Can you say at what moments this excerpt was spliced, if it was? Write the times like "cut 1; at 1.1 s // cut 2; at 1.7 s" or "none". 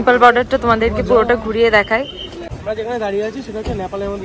cut 1; at 2.4 s